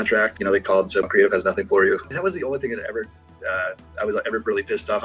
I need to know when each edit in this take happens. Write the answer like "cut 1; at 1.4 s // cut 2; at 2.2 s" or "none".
cut 1; at 1.0 s // cut 2; at 2.1 s